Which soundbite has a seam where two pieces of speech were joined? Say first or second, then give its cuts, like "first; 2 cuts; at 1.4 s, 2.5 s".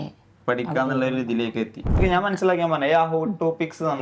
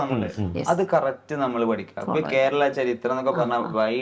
first; 1 cut; at 2.0 s